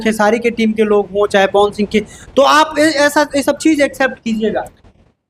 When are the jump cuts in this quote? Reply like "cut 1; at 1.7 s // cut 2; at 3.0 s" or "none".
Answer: none